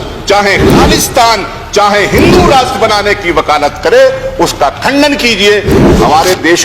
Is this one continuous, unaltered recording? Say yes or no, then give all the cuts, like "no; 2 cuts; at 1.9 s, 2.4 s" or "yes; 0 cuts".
no; 1 cut; at 5.7 s